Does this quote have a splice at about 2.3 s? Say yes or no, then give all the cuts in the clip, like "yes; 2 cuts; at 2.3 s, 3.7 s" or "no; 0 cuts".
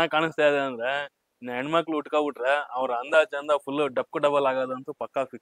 no; 0 cuts